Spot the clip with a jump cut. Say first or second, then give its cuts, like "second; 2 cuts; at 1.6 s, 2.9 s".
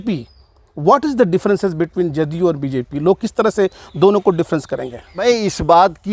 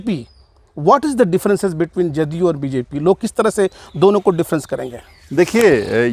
first; 1 cut; at 5.2 s